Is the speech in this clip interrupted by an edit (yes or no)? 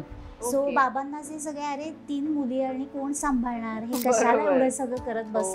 no